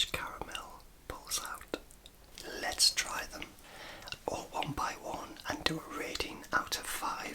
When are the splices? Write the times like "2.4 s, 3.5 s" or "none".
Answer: 2.3 s